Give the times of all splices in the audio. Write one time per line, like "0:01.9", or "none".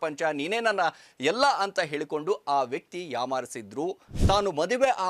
0:04.1